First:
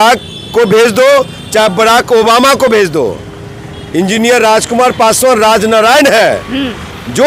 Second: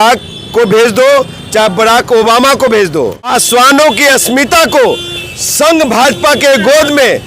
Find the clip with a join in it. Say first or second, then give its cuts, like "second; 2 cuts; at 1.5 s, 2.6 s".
second; 1 cut; at 3.3 s